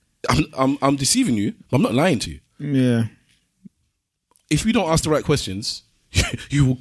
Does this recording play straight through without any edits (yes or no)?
yes